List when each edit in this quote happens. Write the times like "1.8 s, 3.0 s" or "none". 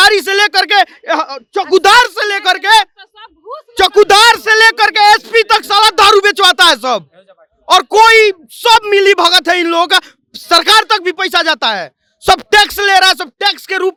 none

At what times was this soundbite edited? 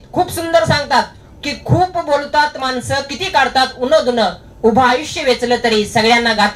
none

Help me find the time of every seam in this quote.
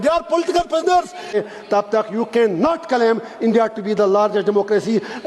1.3 s

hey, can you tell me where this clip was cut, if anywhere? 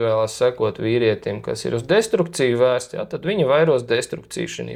none

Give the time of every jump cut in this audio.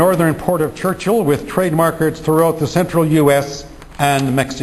none

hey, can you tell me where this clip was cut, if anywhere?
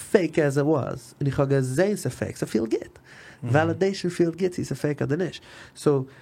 none

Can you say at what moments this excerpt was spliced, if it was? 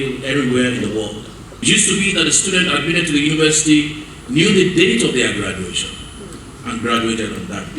1.6 s

